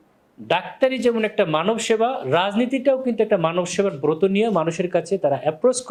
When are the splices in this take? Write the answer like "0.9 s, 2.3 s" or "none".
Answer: none